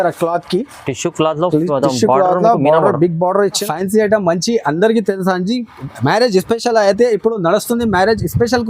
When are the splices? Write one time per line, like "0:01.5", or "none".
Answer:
0:03.6